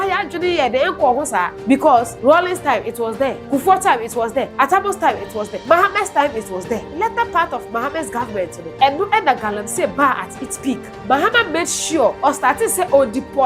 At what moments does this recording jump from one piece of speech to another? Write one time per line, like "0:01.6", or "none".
0:01.9
0:03.4
0:04.5
0:05.5
0:06.9
0:08.6
0:10.9
0:12.2